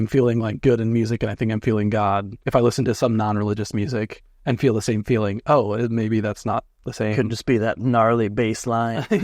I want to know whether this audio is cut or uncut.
cut